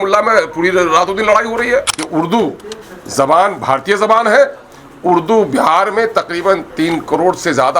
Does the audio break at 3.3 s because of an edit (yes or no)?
no